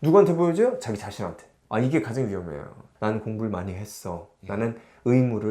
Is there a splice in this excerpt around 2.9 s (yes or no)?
yes